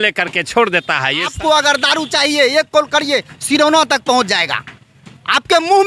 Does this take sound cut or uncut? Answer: cut